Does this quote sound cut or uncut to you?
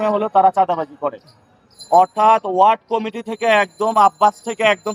uncut